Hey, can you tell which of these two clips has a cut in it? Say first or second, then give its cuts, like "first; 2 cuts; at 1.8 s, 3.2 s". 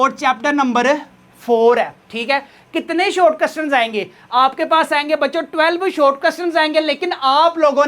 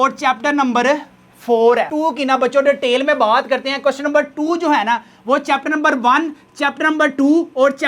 second; 1 cut; at 1.9 s